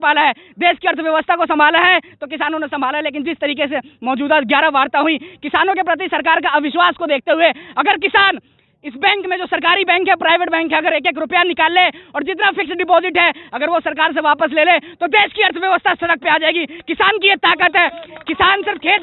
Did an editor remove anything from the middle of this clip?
no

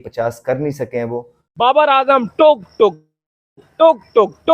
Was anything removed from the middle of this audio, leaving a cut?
yes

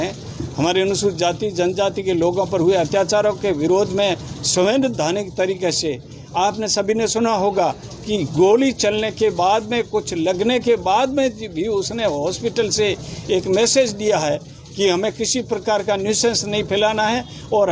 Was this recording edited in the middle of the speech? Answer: no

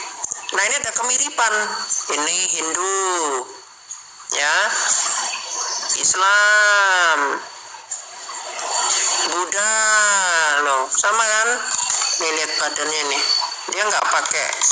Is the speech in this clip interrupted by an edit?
no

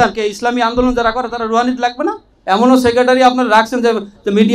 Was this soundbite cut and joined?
yes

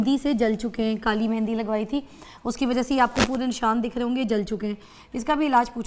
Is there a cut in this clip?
no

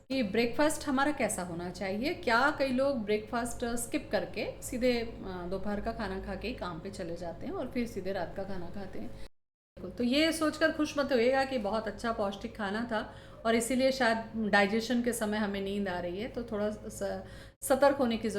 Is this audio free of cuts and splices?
no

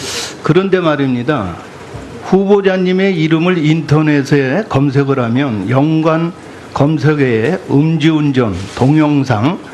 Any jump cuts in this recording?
no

